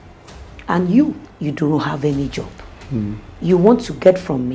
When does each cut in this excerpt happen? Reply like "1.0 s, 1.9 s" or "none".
1.3 s, 3.3 s